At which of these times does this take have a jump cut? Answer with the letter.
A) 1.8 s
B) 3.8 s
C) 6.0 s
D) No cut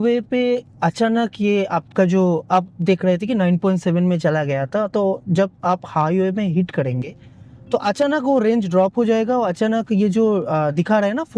D